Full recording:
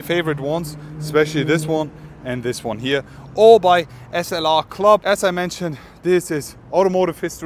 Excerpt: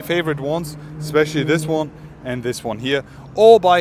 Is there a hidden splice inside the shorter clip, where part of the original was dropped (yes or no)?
no